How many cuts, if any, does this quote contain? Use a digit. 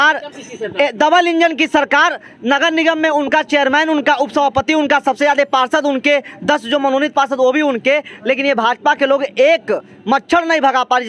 0